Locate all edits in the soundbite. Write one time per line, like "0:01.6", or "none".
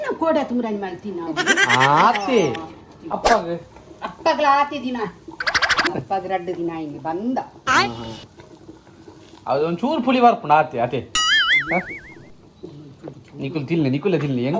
0:03.2